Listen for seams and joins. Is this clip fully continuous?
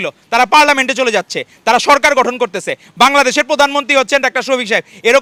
yes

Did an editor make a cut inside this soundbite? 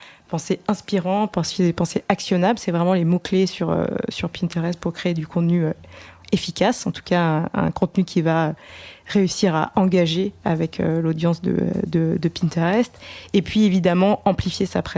no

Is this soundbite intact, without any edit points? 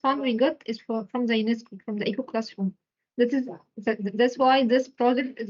yes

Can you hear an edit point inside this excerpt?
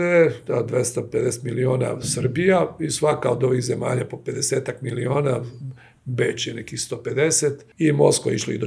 yes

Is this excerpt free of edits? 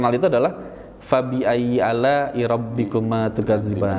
yes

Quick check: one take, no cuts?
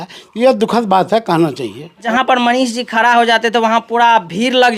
no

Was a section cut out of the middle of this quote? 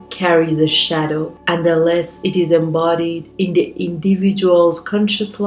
yes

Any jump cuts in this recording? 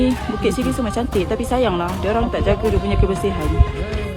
no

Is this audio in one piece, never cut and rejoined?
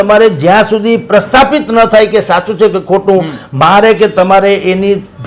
yes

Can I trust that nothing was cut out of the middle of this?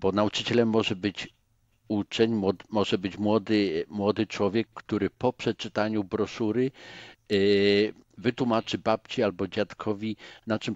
yes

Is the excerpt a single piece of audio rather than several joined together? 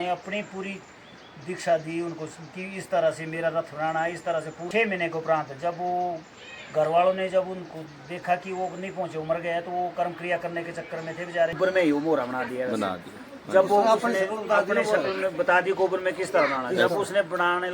no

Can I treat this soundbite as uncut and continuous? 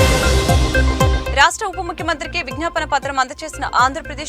yes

